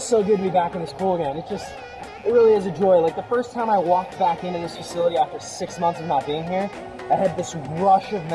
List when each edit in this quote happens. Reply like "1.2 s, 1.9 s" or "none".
none